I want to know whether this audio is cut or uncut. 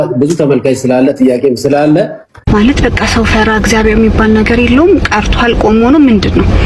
cut